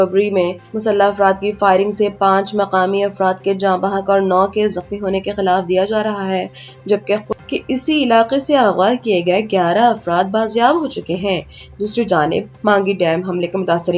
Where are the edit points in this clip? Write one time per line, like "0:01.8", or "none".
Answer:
0:07.3